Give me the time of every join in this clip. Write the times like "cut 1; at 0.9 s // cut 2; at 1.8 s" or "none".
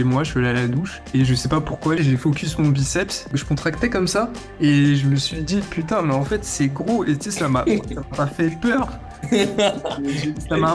cut 1; at 2.0 s // cut 2; at 3.2 s